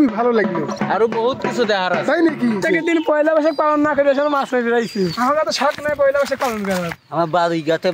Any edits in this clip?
yes; 3 cuts; at 2.6 s, 5.1 s, 7.0 s

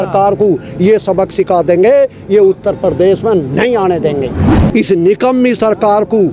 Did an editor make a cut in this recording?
yes; 1 cut; at 4.5 s

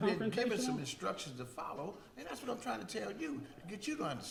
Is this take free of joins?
yes; 0 cuts

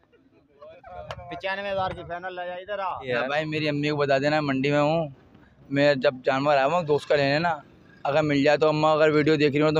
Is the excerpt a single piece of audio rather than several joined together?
no; 1 cut; at 3.1 s

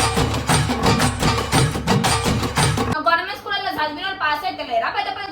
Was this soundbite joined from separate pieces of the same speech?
yes; 1 cut; at 2.9 s

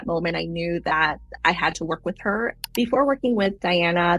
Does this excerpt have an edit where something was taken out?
no; 0 cuts

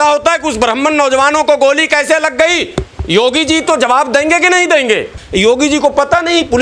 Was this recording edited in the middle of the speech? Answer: yes; 1 cut; at 5.2 s

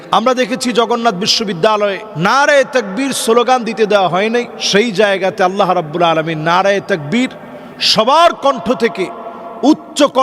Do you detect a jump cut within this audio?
no; 0 cuts

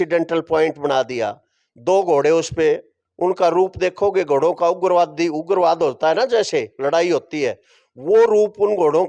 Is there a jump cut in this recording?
no; 0 cuts

